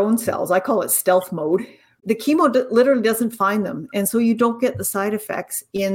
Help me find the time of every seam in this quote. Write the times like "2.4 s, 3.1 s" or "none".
2.0 s